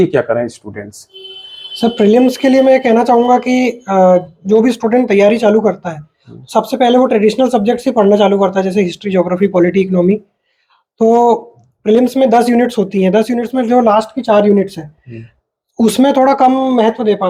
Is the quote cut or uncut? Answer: uncut